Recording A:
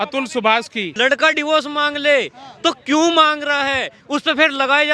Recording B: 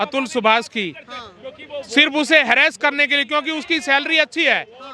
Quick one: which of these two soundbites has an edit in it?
A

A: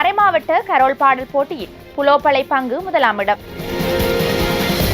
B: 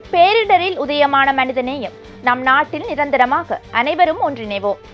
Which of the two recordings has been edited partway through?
A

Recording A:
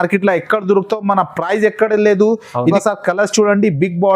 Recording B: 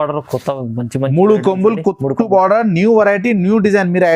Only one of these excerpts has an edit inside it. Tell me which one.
A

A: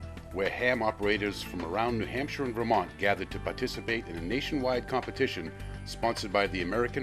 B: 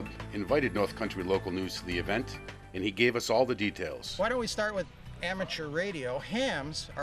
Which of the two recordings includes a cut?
B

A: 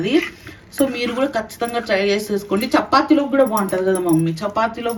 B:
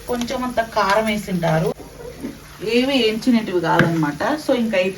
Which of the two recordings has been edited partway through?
B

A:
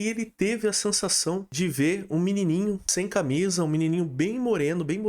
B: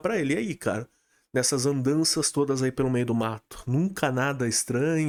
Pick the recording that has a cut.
A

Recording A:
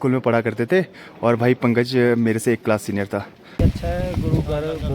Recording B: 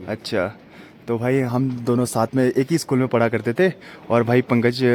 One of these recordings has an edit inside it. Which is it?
A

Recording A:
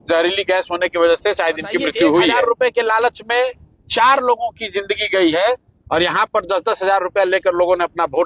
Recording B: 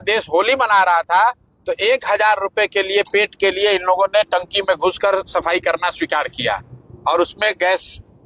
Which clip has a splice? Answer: A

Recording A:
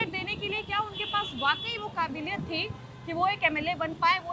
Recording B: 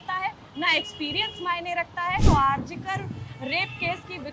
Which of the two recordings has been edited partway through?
B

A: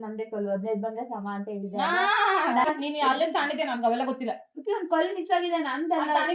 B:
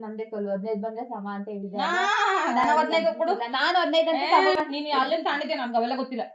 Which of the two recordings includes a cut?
A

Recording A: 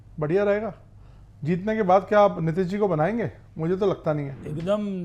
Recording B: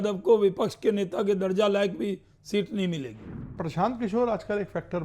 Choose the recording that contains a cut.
B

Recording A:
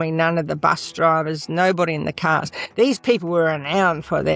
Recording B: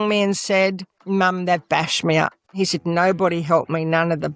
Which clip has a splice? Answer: B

